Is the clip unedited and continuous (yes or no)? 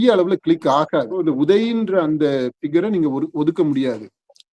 no